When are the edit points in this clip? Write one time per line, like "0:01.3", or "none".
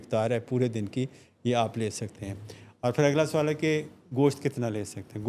none

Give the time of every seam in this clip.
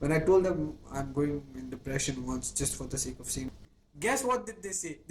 0:03.5

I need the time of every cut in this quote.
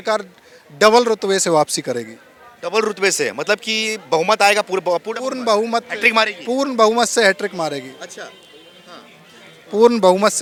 none

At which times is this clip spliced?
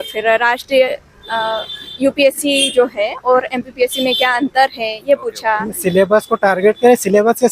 0:05.7

